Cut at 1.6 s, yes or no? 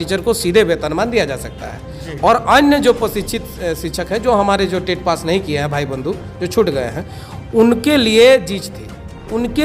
no